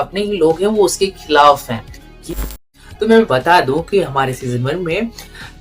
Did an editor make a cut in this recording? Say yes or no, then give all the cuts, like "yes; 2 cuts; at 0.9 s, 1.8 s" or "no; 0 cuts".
yes; 1 cut; at 2.5 s